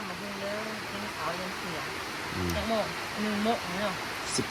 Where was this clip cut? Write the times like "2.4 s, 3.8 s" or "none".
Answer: none